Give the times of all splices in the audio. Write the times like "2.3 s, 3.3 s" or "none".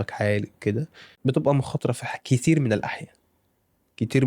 1.0 s